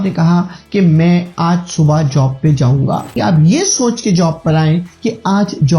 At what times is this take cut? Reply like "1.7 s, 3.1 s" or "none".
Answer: 3.1 s